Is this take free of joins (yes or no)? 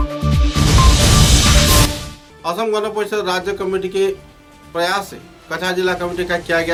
yes